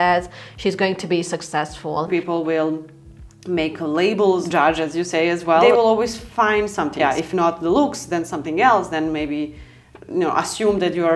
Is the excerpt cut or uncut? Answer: cut